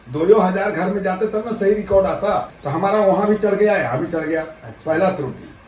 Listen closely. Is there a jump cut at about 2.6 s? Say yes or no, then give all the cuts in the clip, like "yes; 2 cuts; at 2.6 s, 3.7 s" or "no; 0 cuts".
yes; 1 cut; at 2.6 s